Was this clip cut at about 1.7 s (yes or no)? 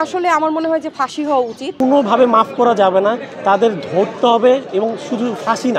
yes